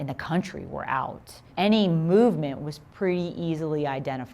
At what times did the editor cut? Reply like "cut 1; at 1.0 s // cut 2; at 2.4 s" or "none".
cut 1; at 1.4 s